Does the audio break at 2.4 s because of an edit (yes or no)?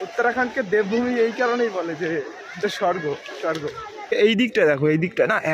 no